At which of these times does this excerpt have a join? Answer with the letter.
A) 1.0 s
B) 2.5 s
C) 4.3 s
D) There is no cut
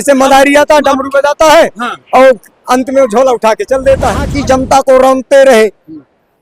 C